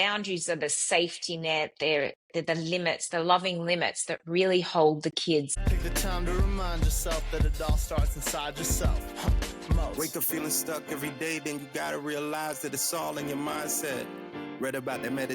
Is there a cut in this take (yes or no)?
yes